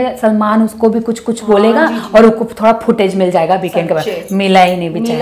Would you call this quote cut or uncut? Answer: uncut